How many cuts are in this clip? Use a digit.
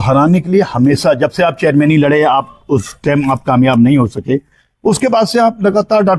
0